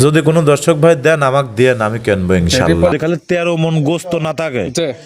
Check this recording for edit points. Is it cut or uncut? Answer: cut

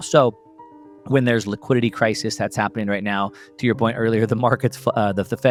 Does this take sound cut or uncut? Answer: uncut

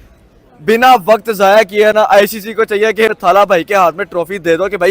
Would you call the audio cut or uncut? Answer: cut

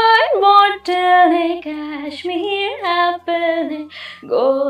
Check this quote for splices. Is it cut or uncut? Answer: uncut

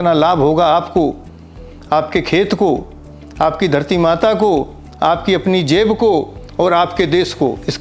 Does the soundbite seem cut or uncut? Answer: uncut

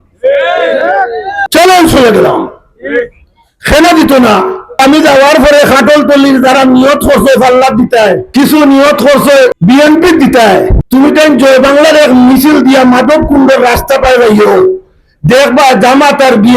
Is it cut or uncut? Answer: cut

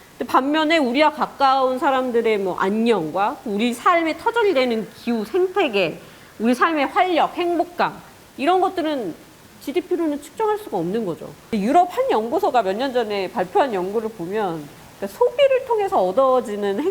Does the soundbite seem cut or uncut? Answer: cut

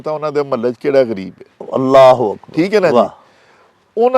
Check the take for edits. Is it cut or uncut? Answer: uncut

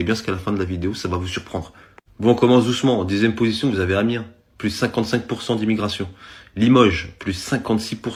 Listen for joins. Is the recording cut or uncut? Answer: uncut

